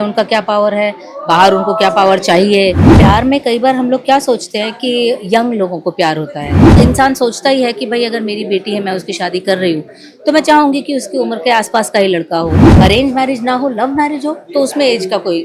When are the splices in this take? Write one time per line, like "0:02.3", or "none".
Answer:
0:03.0
0:06.6
0:12.7